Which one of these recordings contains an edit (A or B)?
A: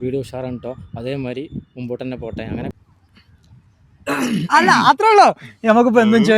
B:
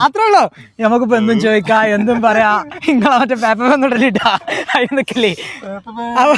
A